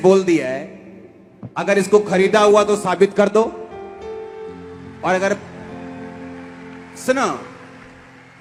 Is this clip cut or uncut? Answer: uncut